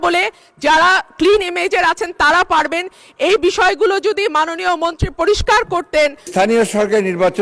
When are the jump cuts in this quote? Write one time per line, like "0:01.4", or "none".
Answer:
0:06.3

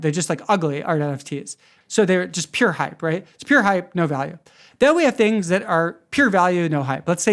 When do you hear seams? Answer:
0:01.7

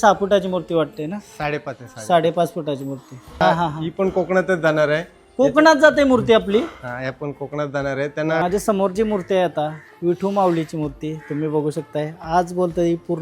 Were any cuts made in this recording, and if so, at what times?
0:03.4
0:08.4

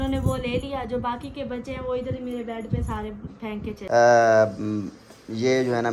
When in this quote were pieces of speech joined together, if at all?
0:03.7

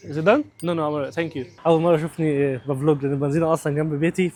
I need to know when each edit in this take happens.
none

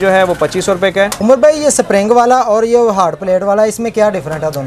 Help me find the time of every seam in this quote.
0:01.1

